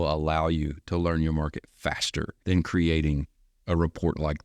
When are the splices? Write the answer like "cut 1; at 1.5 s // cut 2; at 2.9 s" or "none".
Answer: cut 1; at 2.3 s